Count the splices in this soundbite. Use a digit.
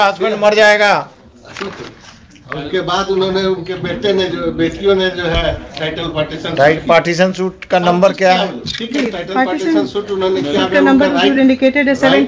0